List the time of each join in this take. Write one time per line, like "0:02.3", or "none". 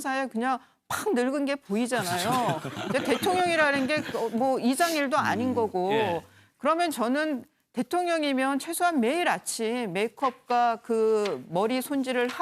0:03.8